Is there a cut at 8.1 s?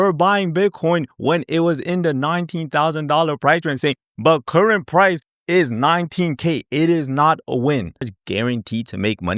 yes; 1 cut; at 8.1 s

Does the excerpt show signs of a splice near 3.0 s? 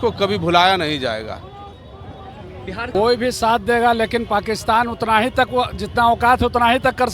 yes; 1 cut; at 3.0 s

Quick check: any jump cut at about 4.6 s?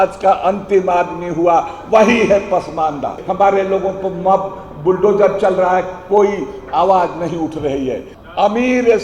no; 2 cuts; at 3.2 s, 8.1 s

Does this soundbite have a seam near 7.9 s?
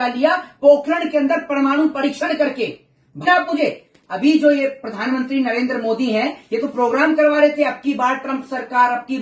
no; 1 cut; at 3.3 s

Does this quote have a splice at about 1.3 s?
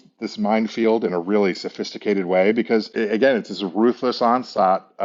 no; 0 cuts

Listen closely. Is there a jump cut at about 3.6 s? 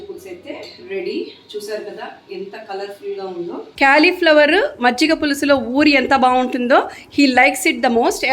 yes; 1 cut; at 3.6 s

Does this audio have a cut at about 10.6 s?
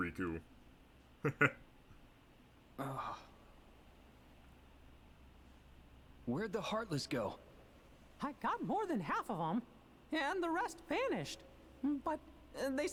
no; 0 cuts

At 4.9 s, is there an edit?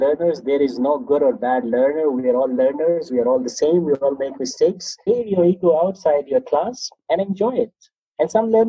yes; 1 cut; at 4.9 s

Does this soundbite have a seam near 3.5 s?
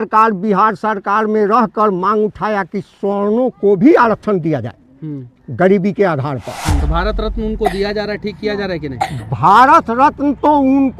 no; 1 cut; at 6.8 s

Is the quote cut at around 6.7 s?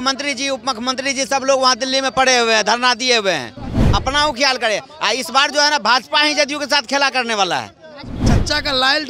no; 1 cut; at 8.1 s

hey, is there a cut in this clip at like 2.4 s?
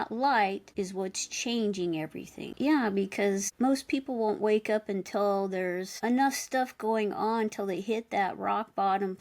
yes; 1 cut; at 2.4 s

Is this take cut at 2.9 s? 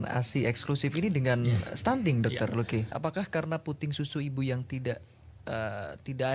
yes; 1 cut; at 2.9 s

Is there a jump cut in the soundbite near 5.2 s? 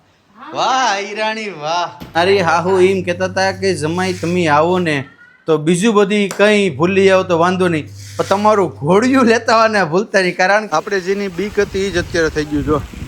no; 2 cuts; at 2.2 s, 10.7 s

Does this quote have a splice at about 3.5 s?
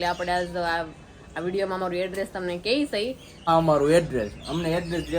yes; 1 cut; at 3.5 s

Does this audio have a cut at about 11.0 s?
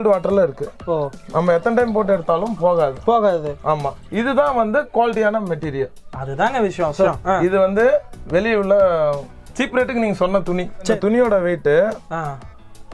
yes; 2 cuts; at 7.1 s, 11.0 s

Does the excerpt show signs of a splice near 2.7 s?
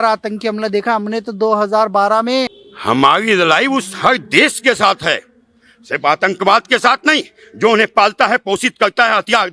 yes; 1 cut; at 2.7 s

